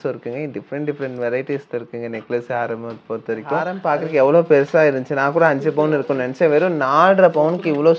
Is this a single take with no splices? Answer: yes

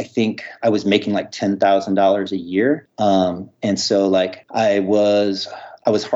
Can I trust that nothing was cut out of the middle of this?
no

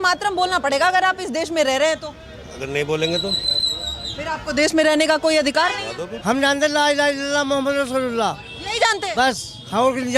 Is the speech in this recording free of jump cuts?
no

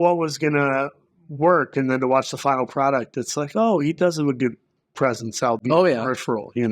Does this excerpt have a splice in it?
no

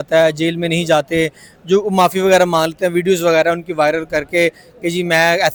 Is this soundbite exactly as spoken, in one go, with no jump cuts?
yes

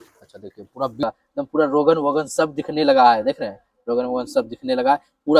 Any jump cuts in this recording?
yes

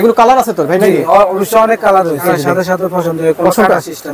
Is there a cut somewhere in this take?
yes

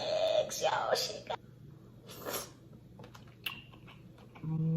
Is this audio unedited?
no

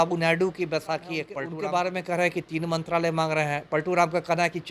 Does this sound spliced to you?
yes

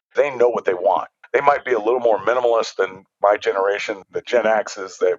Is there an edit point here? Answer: yes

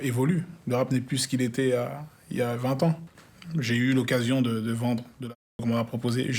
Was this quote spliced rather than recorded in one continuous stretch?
yes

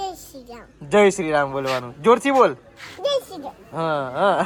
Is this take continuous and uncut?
yes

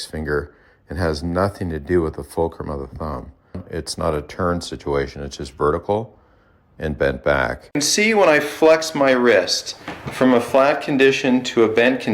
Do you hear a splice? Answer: yes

